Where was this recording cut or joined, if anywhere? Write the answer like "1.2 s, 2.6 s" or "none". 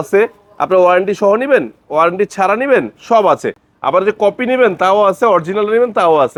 none